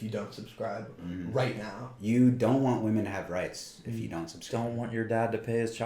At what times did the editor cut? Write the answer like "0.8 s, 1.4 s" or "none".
none

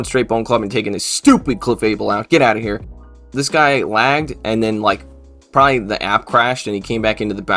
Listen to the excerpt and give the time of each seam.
3.2 s

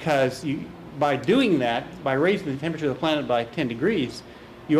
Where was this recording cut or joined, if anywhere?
2.3 s

